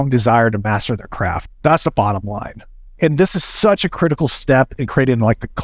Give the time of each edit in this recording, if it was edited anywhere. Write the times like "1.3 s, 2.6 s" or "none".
none